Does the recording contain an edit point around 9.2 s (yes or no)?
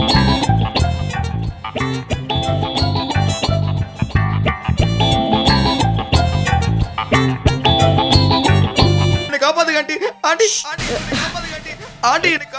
yes